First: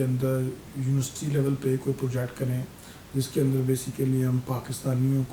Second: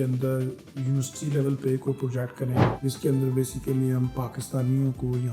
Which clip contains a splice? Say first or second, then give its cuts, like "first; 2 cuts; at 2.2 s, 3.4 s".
second; 1 cut; at 2.7 s